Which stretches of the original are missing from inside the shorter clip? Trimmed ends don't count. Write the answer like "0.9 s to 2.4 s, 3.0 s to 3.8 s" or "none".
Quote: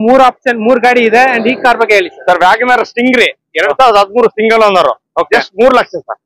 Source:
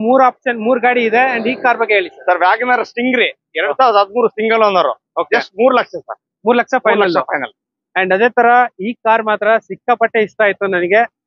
none